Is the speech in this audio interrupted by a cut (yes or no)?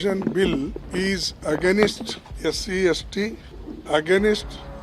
no